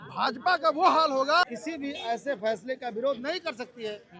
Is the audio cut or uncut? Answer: cut